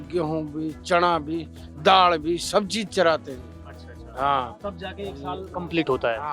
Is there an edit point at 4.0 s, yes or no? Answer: no